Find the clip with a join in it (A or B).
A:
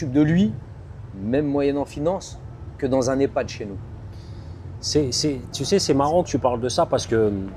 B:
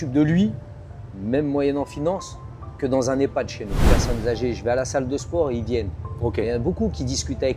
B